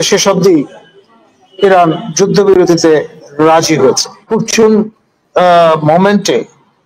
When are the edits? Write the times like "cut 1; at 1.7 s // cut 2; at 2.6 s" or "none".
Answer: cut 1; at 4.3 s